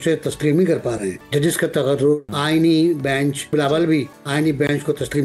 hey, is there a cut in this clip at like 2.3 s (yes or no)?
yes